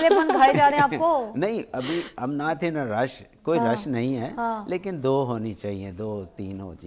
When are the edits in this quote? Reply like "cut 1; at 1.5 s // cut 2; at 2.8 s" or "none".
none

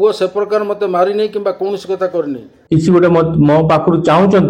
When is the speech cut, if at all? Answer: cut 1; at 2.5 s

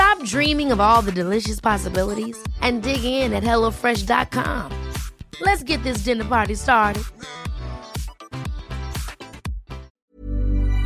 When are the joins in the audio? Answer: cut 1; at 9.9 s

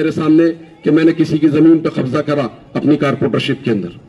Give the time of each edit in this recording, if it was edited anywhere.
none

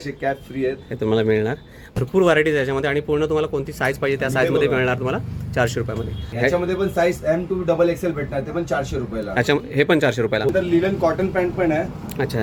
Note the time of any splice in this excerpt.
cut 1; at 1.9 s // cut 2; at 6.3 s // cut 3; at 10.5 s

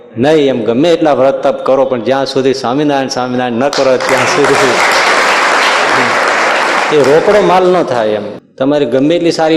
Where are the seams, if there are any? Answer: cut 1; at 8.3 s

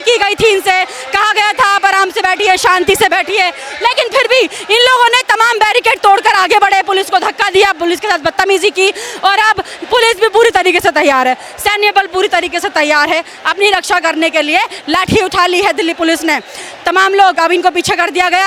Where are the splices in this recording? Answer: none

